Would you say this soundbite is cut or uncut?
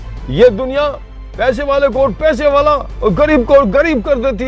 uncut